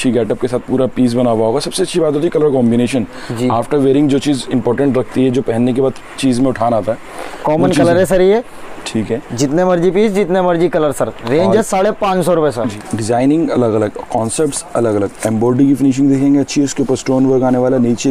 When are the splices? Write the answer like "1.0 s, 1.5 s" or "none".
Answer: none